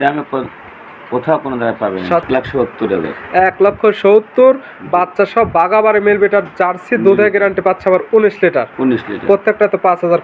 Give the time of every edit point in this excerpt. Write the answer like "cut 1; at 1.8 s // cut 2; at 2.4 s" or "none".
cut 1; at 2.2 s